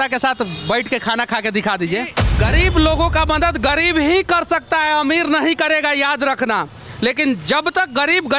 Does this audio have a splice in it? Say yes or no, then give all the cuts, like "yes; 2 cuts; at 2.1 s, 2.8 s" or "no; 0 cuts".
yes; 1 cut; at 2.2 s